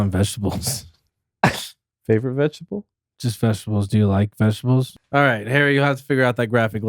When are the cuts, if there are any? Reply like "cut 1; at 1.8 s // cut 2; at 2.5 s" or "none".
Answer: cut 1; at 4.9 s